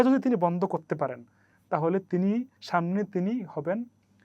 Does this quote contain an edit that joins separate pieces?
yes; 1 cut; at 2.6 s

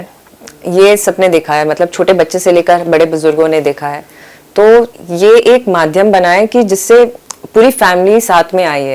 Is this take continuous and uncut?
yes; 0 cuts

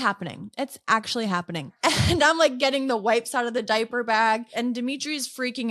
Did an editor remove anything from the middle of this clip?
yes; 2 cuts; at 1.7 s, 4.5 s

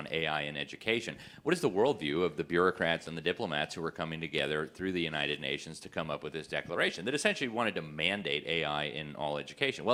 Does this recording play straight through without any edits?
yes; 0 cuts

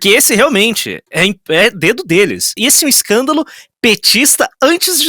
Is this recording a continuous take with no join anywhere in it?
no; 1 cut; at 2.5 s

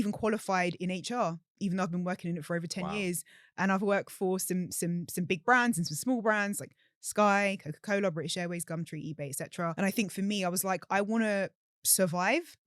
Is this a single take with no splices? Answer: no; 1 cut; at 9.7 s

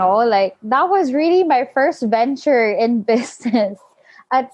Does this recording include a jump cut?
no; 0 cuts

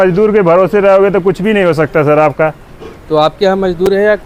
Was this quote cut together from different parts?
no; 0 cuts

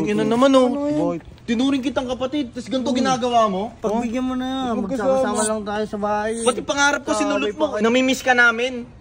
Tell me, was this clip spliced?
yes; 3 cuts; at 1.3 s, 3.7 s, 7.8 s

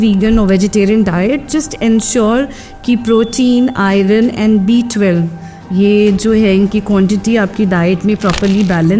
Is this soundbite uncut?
yes; 0 cuts

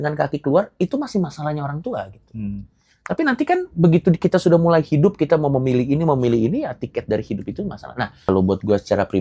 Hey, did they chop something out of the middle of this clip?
yes; 1 cut; at 8.2 s

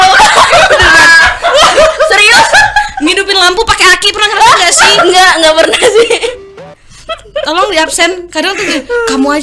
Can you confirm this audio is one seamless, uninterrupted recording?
no; 1 cut; at 6.6 s

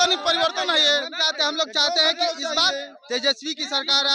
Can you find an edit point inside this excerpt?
no; 0 cuts

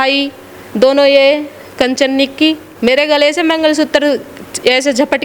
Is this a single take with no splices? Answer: no; 1 cut; at 2.7 s

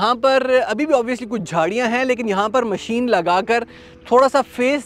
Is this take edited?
no; 0 cuts

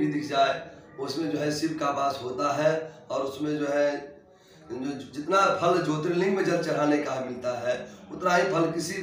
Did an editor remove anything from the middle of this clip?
no; 0 cuts

